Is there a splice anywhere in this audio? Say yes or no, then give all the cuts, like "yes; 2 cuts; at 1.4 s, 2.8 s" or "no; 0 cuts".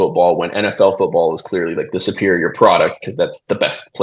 no; 0 cuts